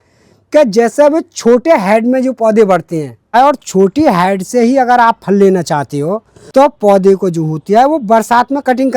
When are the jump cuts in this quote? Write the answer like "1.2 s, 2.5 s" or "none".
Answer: 3.2 s